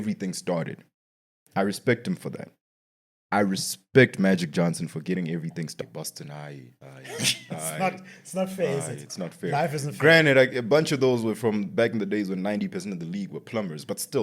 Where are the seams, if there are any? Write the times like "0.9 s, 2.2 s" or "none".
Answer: 5.8 s

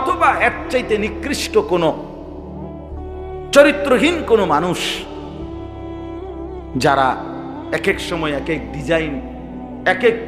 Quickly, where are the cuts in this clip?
2.0 s, 3.5 s

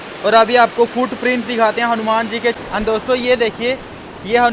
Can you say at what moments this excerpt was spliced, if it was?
2.6 s

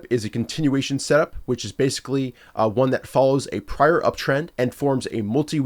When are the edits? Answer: 4.5 s

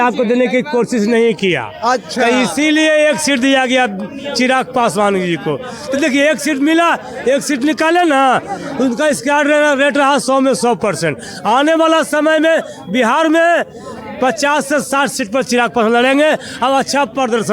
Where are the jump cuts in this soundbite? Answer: none

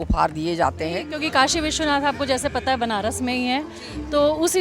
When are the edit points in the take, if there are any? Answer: 1.1 s

